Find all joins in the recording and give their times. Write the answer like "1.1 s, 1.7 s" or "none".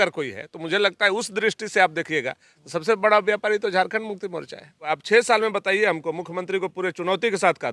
4.9 s